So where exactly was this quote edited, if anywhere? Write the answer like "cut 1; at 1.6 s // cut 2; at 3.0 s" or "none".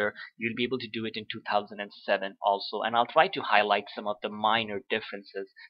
cut 1; at 1.9 s